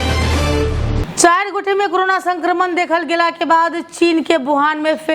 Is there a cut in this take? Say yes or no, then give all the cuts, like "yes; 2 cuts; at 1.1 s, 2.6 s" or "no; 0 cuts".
yes; 1 cut; at 0.9 s